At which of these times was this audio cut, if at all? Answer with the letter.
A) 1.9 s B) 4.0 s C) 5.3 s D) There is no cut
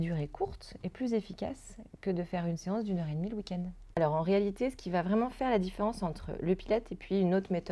B